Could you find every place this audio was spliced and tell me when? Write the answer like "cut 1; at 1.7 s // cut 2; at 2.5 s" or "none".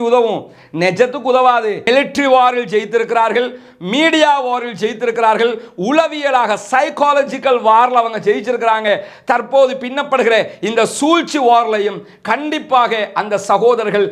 cut 1; at 1.8 s